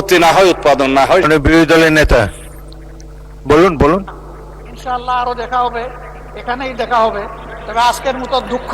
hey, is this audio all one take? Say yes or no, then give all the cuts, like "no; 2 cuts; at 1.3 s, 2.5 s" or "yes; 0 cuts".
no; 1 cut; at 1.3 s